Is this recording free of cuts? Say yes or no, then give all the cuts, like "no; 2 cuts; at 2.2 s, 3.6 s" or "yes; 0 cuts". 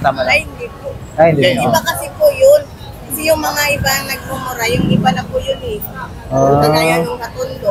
yes; 0 cuts